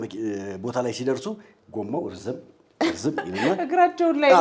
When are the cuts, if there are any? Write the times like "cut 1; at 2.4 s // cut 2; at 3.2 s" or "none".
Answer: none